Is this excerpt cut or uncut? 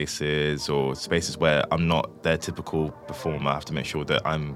uncut